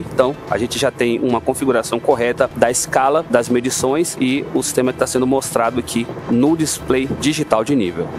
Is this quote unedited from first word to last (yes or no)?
yes